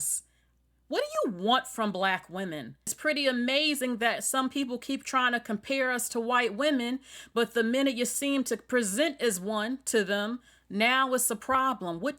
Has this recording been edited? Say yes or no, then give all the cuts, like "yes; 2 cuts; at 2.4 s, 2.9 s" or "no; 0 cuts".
yes; 1 cut; at 3.0 s